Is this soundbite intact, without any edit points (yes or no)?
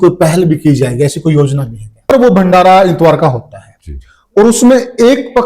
no